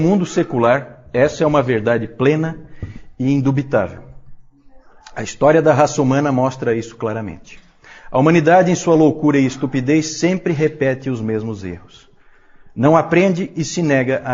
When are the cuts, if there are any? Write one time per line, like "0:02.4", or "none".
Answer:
none